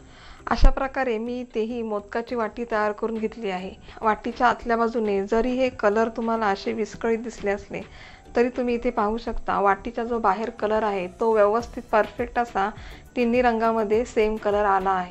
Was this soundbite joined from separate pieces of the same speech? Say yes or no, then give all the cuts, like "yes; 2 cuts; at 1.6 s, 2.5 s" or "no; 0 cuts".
yes; 1 cut; at 4.2 s